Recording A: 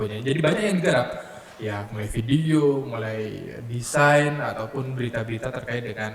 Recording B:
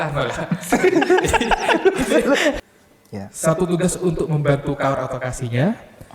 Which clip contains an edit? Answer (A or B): B